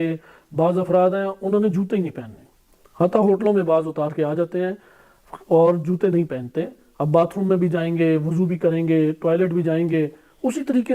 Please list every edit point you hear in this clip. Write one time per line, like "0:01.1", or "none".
none